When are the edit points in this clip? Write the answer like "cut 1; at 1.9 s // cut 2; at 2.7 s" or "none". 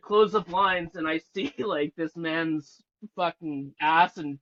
none